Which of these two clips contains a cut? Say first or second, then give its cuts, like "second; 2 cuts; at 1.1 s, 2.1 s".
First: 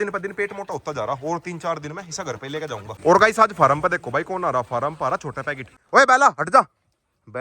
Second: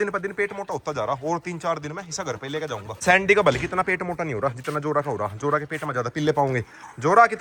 first; 2 cuts; at 2.9 s, 5.7 s